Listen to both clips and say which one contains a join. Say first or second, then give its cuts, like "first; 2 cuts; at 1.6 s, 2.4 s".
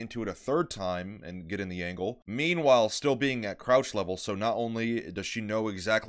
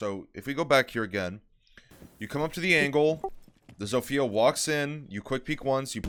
first; 1 cut; at 2.2 s